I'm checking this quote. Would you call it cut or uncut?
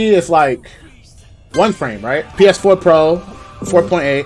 cut